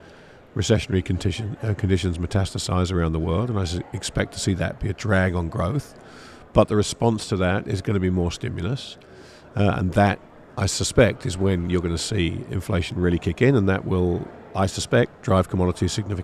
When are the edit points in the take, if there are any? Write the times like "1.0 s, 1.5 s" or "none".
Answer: none